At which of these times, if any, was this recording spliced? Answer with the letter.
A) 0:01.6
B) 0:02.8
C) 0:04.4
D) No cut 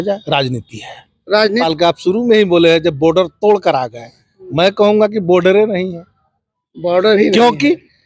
A